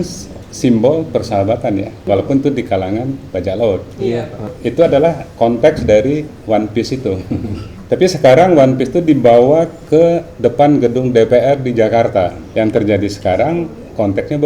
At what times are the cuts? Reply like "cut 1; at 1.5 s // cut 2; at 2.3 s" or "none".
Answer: cut 1; at 2.0 s // cut 2; at 4.5 s // cut 3; at 7.7 s // cut 4; at 12.4 s